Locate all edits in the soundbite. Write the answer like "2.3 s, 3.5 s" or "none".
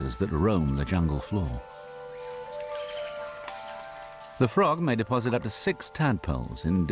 1.2 s

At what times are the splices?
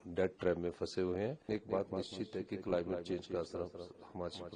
1.5 s

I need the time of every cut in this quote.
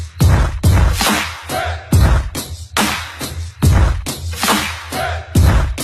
none

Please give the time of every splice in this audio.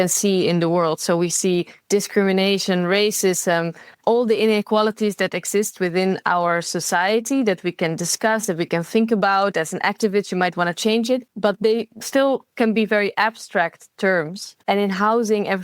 11.3 s, 14.4 s

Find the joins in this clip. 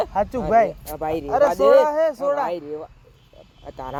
none

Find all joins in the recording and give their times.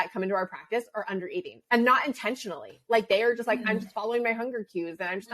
none

